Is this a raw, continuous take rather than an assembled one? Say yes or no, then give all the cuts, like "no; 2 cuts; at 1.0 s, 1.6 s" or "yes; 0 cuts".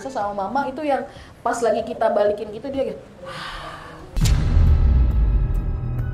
yes; 0 cuts